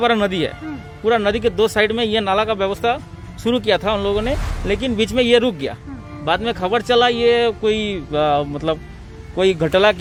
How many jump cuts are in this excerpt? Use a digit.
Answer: 0